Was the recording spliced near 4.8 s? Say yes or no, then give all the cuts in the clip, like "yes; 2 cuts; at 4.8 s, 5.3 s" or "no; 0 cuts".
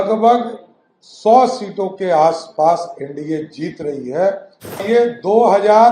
yes; 1 cut; at 4.8 s